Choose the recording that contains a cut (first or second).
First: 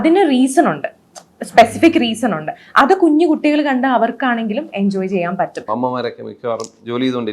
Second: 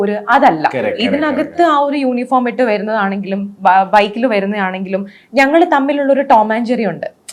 first